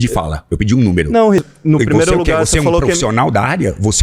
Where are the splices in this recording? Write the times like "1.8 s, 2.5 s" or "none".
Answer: 1.4 s